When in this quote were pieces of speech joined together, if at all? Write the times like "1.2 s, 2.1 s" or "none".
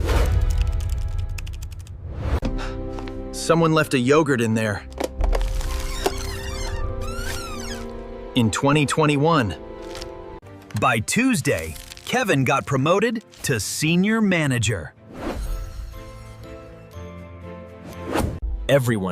4.9 s, 15.0 s

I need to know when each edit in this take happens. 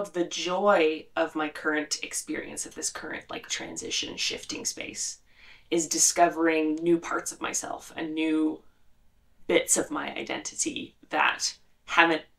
none

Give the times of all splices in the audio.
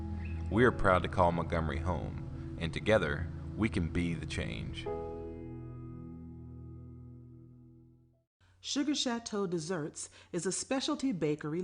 8.0 s

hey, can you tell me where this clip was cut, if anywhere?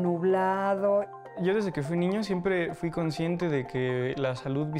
1.3 s

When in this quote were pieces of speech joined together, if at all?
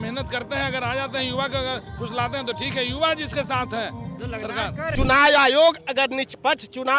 4.9 s

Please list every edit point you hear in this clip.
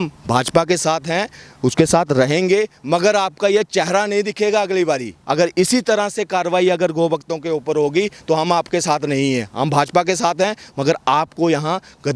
5.1 s

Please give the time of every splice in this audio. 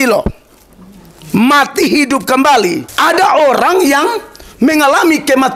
2.9 s

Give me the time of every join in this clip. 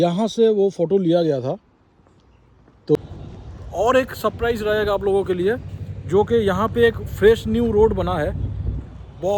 3.0 s

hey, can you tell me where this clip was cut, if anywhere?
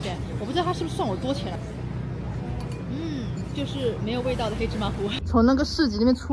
1.6 s, 5.2 s

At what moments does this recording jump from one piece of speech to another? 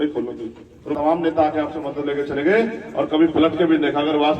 1.0 s

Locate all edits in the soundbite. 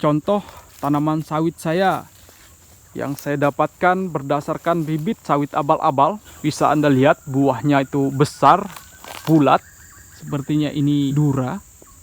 6.3 s, 11.1 s

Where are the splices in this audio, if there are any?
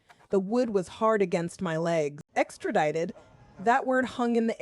2.2 s

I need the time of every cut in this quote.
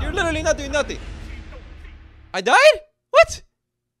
none

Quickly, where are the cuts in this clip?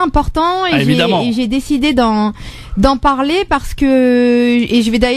4.1 s

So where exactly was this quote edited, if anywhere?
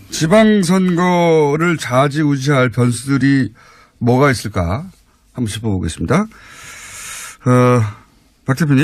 none

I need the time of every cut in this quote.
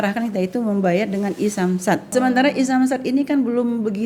2.1 s

